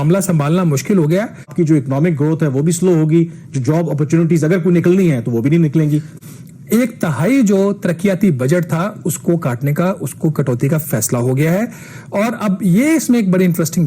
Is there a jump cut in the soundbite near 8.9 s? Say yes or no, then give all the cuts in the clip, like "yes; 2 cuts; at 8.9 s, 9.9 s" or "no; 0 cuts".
no; 2 cuts; at 1.5 s, 6.2 s